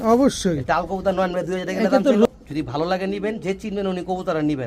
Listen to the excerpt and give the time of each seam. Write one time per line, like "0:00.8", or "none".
0:02.3